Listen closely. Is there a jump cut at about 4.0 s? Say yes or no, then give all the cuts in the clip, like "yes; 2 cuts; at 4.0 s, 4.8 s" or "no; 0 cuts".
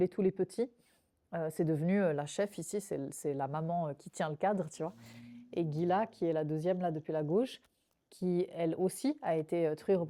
no; 0 cuts